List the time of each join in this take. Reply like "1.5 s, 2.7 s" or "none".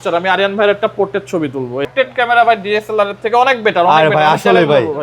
1.9 s